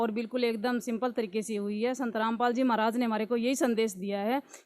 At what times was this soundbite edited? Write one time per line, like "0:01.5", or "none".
none